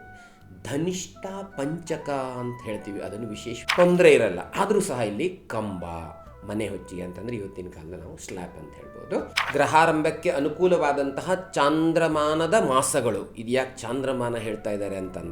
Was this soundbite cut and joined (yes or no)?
yes